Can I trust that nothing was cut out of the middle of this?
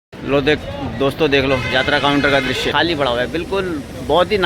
no; 1 cut; at 2.7 s

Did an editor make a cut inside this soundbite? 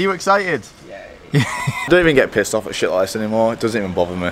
yes; 1 cut; at 1.9 s

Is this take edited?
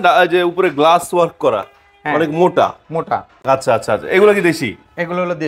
no; 0 cuts

